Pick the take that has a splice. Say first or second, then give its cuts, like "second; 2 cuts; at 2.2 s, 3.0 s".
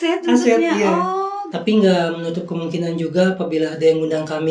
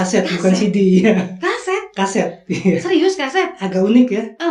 first; 1 cut; at 1.4 s